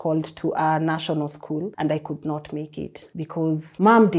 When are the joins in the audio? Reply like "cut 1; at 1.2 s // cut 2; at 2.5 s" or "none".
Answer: cut 1; at 1.7 s // cut 2; at 3.3 s